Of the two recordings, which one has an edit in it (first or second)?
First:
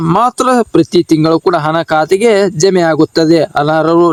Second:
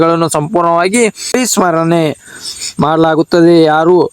second